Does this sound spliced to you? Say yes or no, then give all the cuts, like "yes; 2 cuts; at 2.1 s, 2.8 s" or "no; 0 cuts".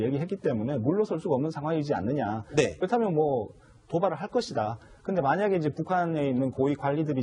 no; 0 cuts